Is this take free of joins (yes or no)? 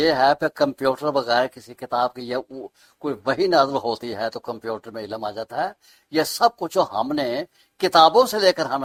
yes